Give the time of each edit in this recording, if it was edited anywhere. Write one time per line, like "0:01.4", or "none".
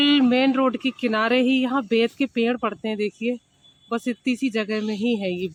none